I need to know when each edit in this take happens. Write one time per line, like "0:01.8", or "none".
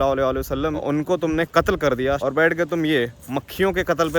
0:00.8
0:02.2